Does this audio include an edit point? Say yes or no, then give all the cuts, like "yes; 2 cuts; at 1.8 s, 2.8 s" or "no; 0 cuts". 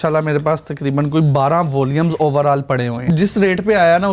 yes; 1 cut; at 3.0 s